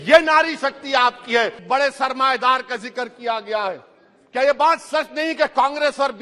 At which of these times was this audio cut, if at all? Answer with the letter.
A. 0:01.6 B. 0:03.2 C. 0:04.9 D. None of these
A